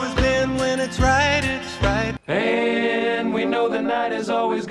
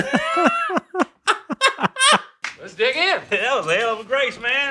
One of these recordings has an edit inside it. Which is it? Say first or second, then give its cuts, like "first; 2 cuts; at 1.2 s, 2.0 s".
first; 1 cut; at 2.1 s